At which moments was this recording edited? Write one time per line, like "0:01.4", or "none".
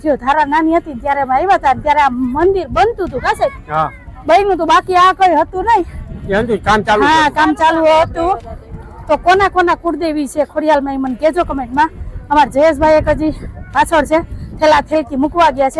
none